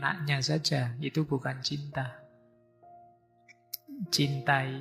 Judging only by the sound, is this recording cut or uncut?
uncut